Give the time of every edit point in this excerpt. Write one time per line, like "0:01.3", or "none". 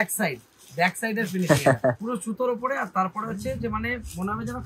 0:02.0

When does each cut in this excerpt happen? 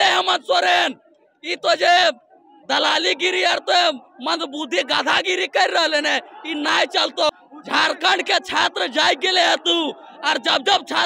0:07.3

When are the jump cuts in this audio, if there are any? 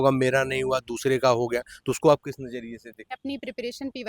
0:03.1

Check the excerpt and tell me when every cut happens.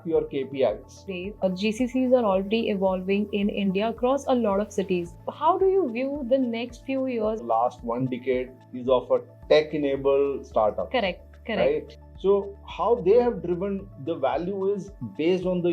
0:01.1
0:07.4

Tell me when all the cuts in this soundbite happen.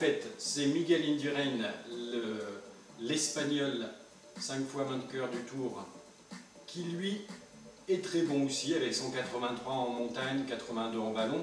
0:07.4

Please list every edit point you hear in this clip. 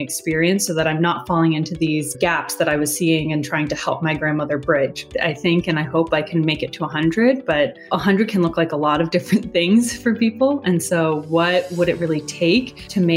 0:05.1

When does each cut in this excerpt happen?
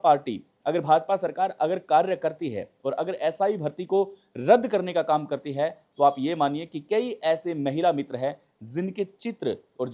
none

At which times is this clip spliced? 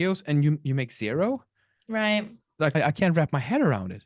0:02.8

